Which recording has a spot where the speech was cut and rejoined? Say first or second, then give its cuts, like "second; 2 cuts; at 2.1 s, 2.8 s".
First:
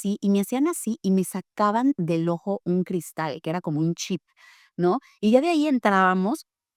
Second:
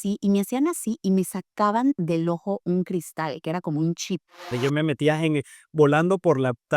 second; 1 cut; at 4.5 s